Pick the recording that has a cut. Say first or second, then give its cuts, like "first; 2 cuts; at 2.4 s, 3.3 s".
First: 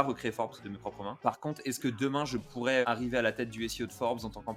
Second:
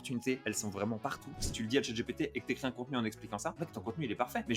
second; 1 cut; at 1.3 s